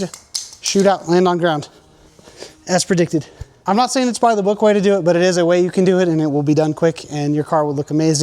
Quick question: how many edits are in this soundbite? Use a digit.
1